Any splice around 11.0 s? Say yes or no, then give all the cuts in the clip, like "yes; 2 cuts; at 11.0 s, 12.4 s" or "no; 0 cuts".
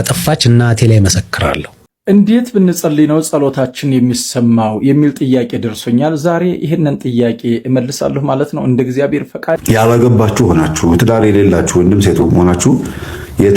no; 2 cuts; at 1.9 s, 9.6 s